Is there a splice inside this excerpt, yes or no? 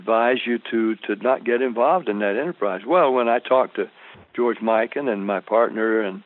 no